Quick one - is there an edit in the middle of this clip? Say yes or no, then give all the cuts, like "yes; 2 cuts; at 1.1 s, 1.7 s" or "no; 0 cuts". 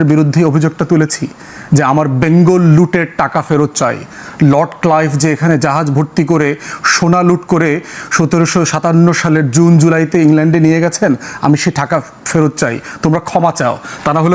no; 0 cuts